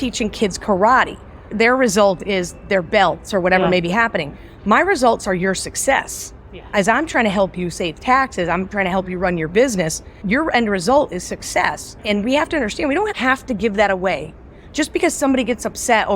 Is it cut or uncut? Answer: cut